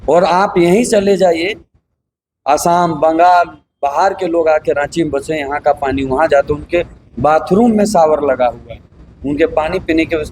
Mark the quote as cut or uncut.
uncut